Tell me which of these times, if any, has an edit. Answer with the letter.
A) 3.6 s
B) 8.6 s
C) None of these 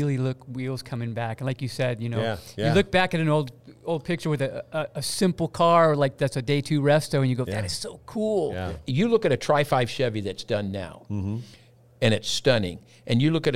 B